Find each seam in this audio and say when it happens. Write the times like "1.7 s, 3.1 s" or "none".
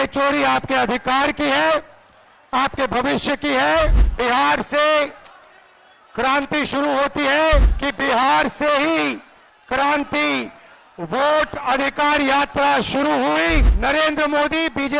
4.0 s, 7.8 s, 13.7 s